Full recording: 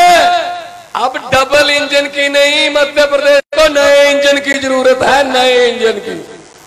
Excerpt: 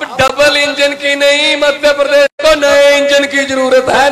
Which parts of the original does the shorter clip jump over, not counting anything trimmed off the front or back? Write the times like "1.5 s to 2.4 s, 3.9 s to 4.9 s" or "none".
none